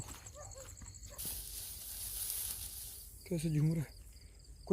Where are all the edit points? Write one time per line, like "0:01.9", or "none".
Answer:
0:01.2